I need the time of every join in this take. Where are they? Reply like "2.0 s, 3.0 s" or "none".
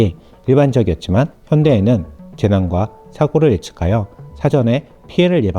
1.4 s